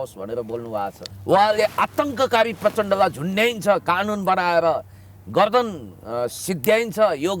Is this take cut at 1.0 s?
yes; 1 cut; at 1.0 s

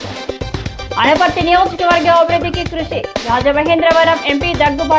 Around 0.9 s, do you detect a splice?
yes; 1 cut; at 0.9 s

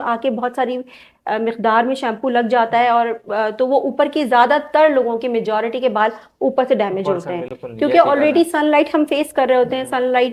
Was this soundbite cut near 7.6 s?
no; 0 cuts

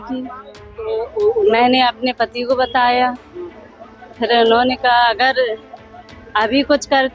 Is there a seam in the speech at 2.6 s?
no; 1 cut; at 0.9 s

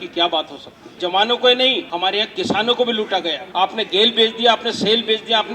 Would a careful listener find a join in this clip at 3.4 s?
yes; 3 cuts; at 0.9 s, 1.9 s, 3.4 s

